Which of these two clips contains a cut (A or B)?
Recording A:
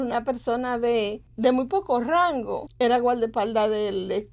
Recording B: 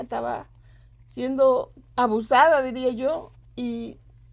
A